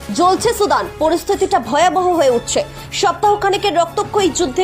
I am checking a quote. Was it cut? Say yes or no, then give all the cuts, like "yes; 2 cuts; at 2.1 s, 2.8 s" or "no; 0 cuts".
no; 0 cuts